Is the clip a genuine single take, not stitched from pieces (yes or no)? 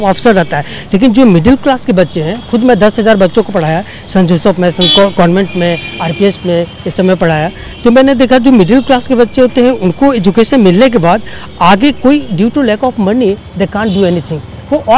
yes